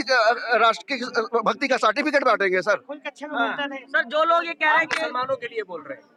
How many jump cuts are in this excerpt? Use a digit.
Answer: 0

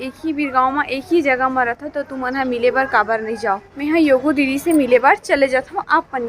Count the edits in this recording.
1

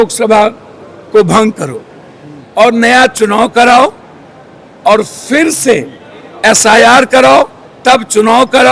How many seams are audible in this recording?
0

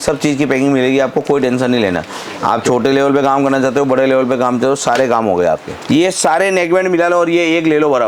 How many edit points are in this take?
1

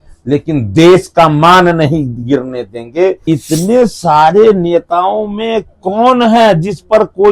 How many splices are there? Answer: 1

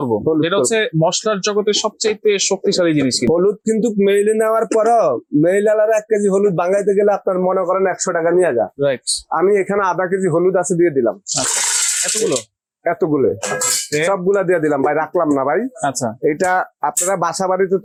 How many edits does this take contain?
0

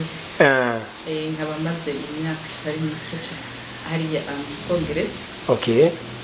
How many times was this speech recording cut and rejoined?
0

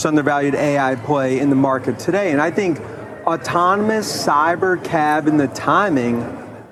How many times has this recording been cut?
0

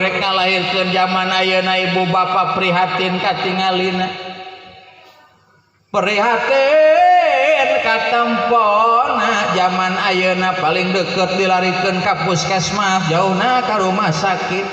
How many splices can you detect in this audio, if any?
0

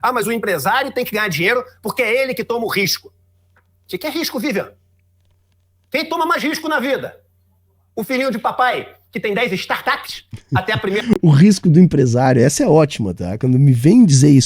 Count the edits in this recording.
1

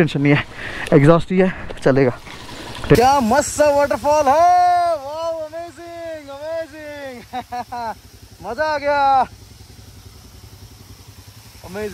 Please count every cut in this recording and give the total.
1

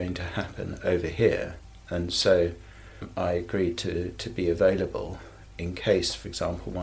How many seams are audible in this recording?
1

